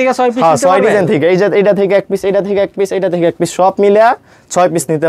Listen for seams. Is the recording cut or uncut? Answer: uncut